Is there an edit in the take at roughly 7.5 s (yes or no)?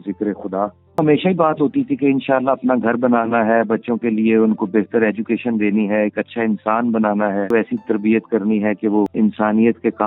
yes